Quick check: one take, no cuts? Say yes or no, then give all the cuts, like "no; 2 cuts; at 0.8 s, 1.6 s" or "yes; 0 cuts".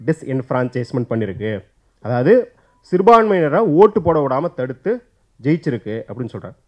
yes; 0 cuts